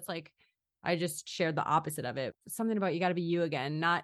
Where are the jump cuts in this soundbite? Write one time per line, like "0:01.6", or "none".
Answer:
0:02.3